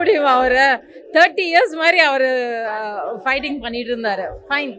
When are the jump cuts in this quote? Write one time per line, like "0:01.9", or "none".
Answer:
none